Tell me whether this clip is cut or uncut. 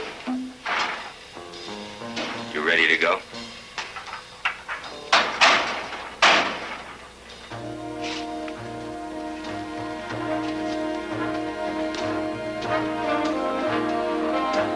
uncut